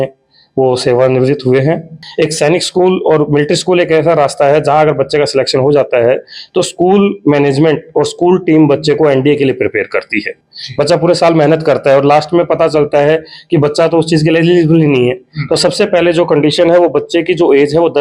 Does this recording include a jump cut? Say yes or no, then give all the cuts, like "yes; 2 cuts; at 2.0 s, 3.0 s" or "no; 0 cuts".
yes; 2 cuts; at 2.0 s, 10.4 s